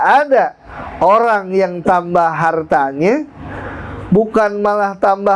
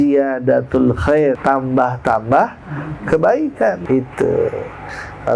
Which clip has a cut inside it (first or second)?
second